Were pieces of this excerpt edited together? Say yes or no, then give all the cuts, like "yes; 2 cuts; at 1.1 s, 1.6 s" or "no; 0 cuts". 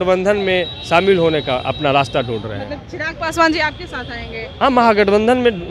no; 0 cuts